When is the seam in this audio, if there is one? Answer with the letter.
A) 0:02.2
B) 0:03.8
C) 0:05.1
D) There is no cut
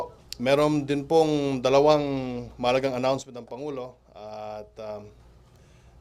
B